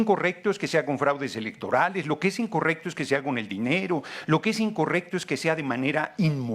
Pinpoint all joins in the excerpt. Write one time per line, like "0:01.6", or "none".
none

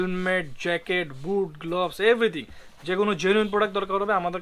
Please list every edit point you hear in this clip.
none

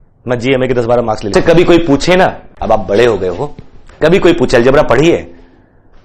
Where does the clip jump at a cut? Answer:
0:01.3

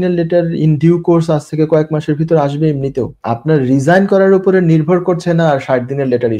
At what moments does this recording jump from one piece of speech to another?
0:03.2

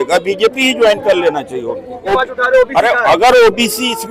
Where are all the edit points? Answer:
0:02.1

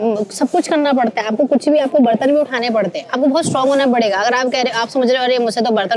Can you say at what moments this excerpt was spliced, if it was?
none

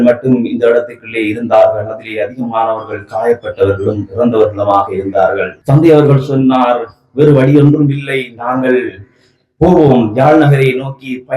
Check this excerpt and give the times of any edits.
0:05.5

